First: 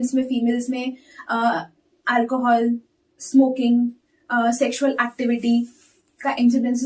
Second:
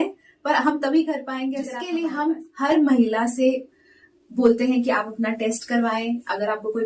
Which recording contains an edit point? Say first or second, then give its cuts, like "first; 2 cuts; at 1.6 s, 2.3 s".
second; 1 cut; at 1.7 s